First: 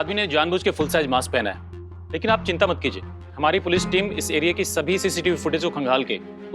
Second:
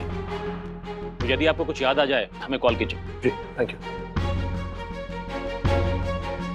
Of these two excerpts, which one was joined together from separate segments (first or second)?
first